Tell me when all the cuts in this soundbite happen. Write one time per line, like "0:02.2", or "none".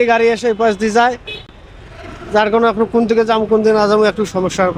none